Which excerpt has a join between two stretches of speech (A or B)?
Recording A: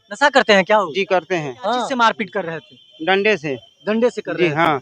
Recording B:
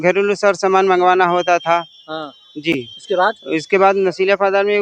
A